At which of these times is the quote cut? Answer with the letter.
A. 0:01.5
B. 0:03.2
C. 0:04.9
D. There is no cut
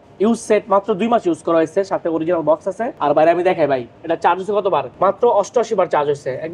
C